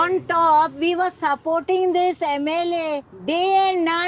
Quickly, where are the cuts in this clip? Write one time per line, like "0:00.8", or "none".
0:03.1